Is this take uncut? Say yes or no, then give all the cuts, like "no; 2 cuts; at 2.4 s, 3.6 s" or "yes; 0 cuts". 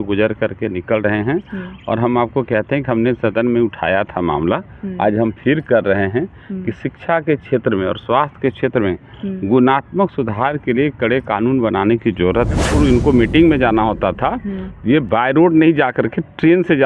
no; 1 cut; at 12.6 s